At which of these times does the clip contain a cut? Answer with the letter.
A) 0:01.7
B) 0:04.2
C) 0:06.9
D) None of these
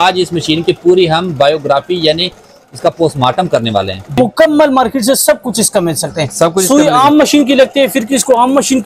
B